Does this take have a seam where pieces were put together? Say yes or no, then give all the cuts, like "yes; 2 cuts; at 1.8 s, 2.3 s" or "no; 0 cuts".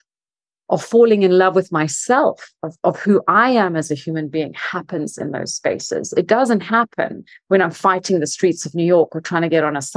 no; 0 cuts